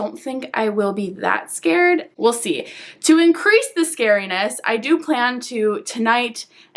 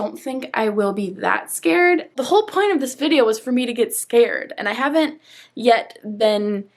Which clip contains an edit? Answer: second; 1 cut; at 2.1 s

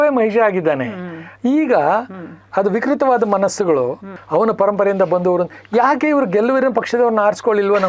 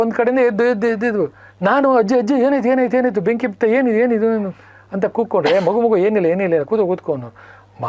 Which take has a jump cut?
first; 1 cut; at 4.2 s

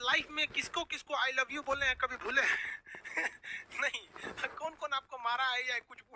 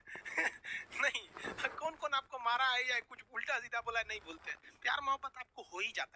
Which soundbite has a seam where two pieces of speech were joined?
second; 1 cut; at 4.3 s

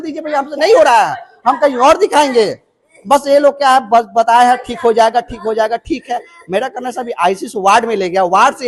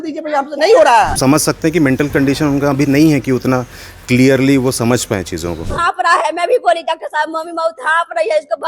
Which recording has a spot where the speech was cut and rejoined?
second; 2 cuts; at 1.1 s, 5.7 s

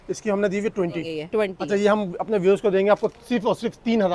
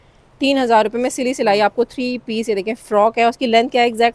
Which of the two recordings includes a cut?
first; 1 cut; at 1.4 s

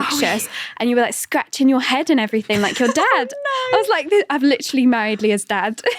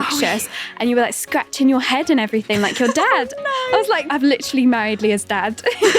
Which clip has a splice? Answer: second; 1 cut; at 4.1 s

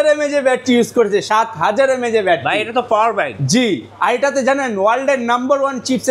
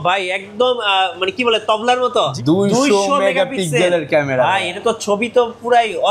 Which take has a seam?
second; 1 cut; at 2.3 s

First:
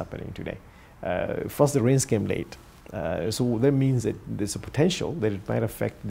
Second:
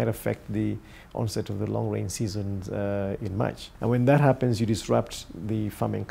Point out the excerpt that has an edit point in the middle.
second; 1 cut; at 3.7 s

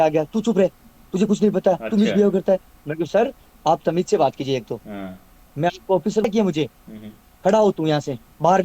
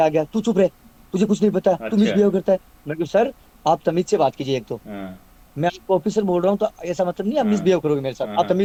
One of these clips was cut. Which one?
first; 1 cut; at 6.2 s

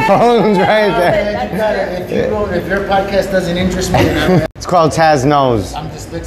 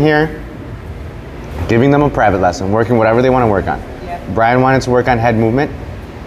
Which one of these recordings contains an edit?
first; 1 cut; at 4.5 s

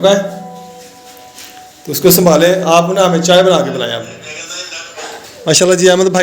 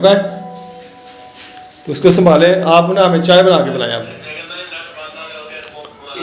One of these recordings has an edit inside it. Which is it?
first; 1 cut; at 5.2 s

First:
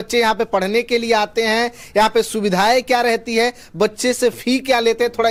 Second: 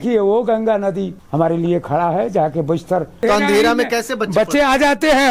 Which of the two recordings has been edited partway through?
second; 2 cuts; at 1.2 s, 3.2 s

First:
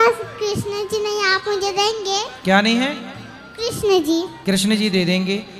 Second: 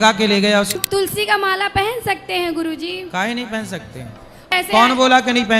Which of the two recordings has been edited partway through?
second; 2 cuts; at 0.8 s, 4.5 s

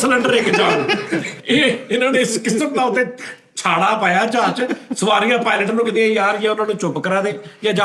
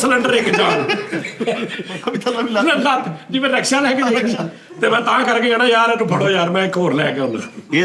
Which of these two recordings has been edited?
first; 1 cut; at 1.3 s

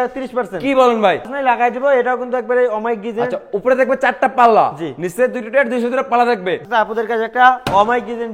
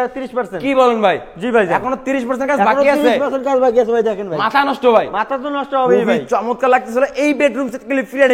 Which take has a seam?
first; 2 cuts; at 1.3 s, 6.6 s

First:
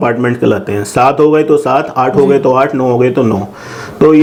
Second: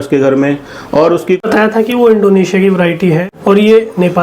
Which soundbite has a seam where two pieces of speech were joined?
second; 1 cut; at 1.4 s

